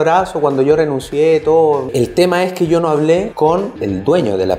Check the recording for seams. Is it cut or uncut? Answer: cut